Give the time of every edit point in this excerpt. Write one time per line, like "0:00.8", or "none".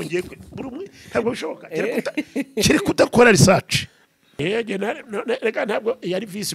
0:04.3